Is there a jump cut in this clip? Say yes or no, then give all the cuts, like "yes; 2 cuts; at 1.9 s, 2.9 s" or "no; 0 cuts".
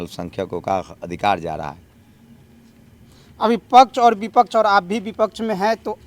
no; 0 cuts